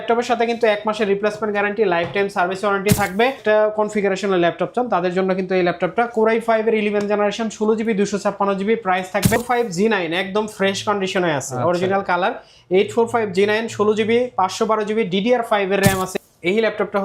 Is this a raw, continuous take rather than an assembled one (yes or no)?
no